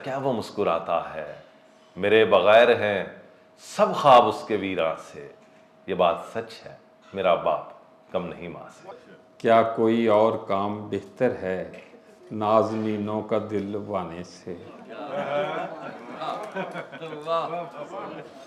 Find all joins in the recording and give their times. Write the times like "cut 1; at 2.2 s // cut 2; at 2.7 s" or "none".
cut 1; at 8.9 s